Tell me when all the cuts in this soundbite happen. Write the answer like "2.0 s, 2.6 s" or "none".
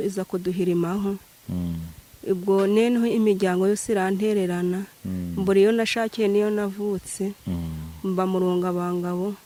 none